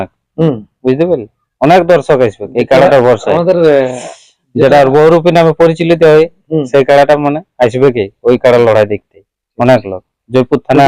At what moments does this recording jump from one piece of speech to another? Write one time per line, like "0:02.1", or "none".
none